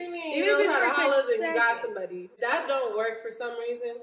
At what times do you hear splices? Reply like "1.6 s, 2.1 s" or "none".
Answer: 2.4 s